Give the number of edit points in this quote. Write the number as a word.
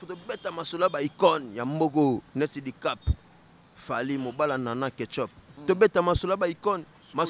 one